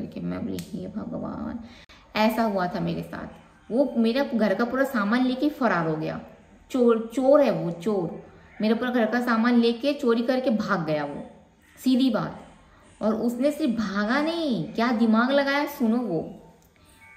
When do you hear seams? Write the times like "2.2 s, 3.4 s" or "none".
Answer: none